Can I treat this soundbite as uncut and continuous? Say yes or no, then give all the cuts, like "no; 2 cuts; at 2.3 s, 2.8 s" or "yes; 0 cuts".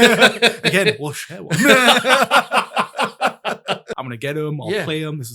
no; 1 cut; at 3.9 s